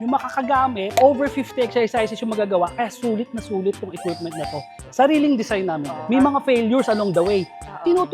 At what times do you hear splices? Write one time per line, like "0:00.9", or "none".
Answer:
0:06.1